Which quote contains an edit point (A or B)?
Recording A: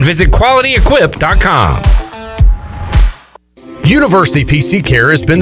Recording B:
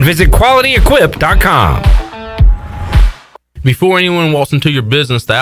B